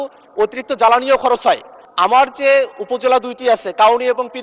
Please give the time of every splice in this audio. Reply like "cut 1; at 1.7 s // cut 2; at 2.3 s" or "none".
cut 1; at 1.8 s